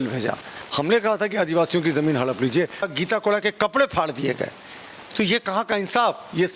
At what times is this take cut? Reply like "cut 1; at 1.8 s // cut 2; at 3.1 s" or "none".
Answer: cut 1; at 2.9 s